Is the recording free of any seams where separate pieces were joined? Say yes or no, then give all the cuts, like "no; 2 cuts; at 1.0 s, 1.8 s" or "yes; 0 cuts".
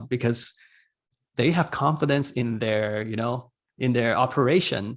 no; 1 cut; at 3.6 s